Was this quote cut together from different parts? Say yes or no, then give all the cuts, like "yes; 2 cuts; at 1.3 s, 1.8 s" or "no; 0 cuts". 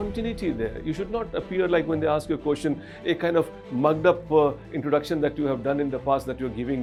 no; 0 cuts